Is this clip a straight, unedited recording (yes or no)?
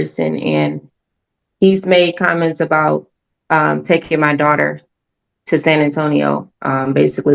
yes